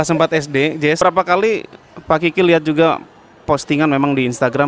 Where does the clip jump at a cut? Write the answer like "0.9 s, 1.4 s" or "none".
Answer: 1.0 s